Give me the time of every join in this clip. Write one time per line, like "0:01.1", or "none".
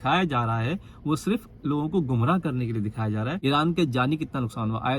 0:03.3